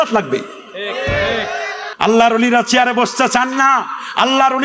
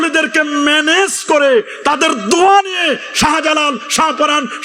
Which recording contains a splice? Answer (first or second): first